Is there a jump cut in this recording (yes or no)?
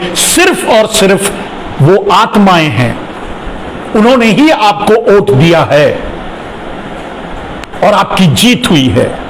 no